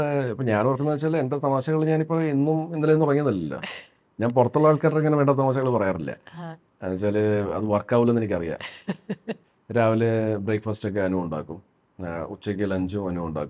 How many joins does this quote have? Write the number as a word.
one